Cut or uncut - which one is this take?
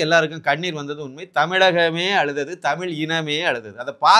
uncut